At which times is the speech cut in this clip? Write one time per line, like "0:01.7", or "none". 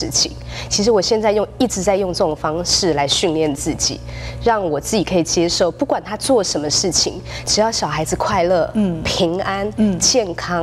0:07.3